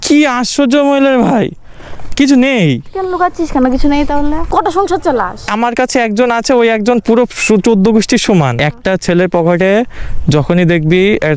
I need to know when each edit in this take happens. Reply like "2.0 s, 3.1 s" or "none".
4.4 s, 5.5 s, 8.5 s

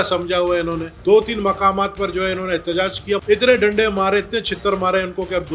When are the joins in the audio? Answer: 0.9 s, 3.2 s

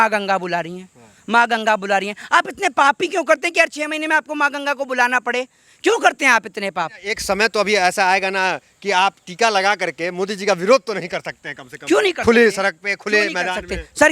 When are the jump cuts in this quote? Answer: 7.0 s

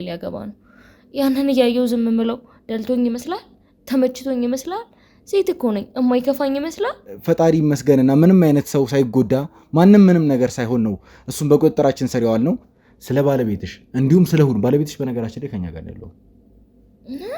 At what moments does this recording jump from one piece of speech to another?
7.1 s, 12.7 s

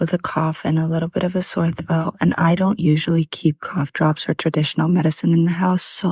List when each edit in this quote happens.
none

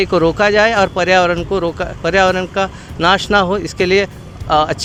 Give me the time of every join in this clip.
none

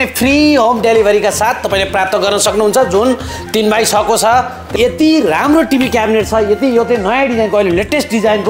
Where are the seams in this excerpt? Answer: 4.6 s

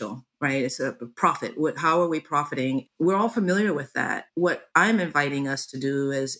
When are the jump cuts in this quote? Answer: 2.9 s, 4.4 s

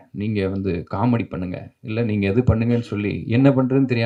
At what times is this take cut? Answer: none

